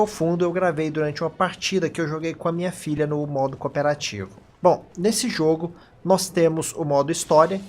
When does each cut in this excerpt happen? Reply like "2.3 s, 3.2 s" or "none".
2.3 s